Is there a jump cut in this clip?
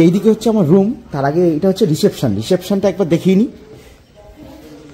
no; 0 cuts

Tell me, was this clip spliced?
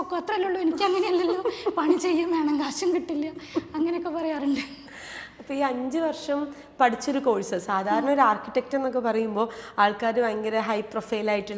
no; 0 cuts

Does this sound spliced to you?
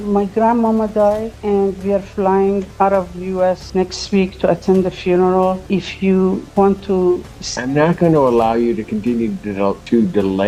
no; 0 cuts

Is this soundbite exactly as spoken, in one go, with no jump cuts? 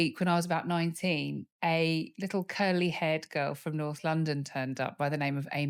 yes; 0 cuts

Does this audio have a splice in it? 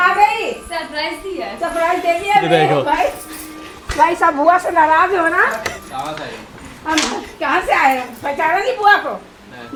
no; 0 cuts

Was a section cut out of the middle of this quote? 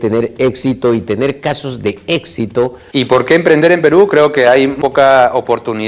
yes; 2 cuts; at 2.8 s, 4.8 s

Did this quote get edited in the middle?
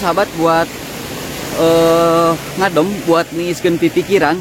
no; 0 cuts

